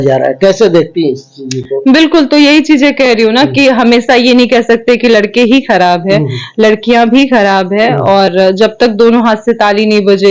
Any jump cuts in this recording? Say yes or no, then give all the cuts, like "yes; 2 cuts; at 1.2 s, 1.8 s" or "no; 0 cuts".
no; 0 cuts